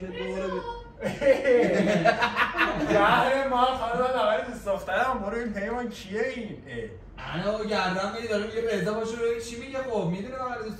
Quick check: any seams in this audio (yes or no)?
no